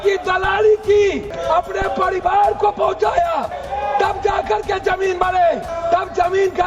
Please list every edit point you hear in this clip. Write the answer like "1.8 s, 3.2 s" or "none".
1.3 s, 3.6 s, 5.7 s